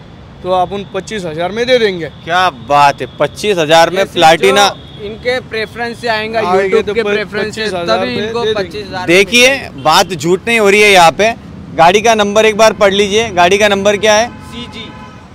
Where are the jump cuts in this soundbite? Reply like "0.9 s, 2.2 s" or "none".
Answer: none